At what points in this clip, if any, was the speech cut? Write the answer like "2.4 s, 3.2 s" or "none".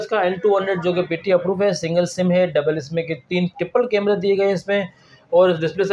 none